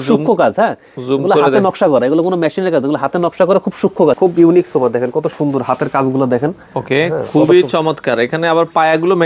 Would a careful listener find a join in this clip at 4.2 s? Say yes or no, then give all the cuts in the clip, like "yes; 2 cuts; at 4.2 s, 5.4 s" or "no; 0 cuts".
yes; 1 cut; at 4.2 s